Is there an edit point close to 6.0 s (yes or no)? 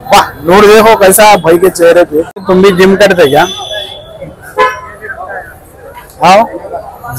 no